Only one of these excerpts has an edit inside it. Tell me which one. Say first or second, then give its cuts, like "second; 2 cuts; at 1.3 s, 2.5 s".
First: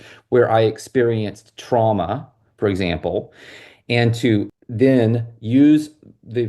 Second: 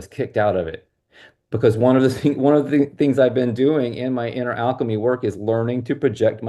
first; 1 cut; at 4.6 s